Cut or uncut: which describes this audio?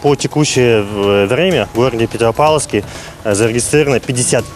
uncut